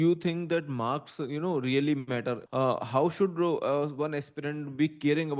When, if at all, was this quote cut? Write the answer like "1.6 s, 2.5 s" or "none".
2.4 s